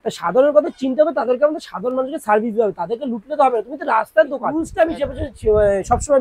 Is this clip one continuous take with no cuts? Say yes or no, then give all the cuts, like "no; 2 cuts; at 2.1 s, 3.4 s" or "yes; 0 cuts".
no; 1 cut; at 4.6 s